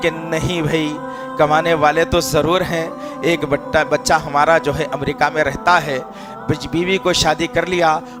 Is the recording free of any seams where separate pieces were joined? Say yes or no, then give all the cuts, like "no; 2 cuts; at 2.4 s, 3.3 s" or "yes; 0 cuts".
yes; 0 cuts